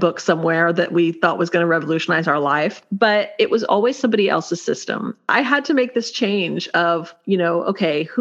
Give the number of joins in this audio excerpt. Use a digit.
3